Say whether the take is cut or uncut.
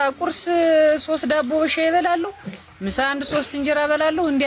uncut